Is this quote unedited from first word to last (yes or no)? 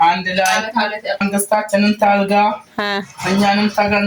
no